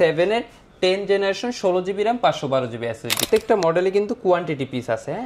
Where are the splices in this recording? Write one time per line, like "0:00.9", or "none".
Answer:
0:03.2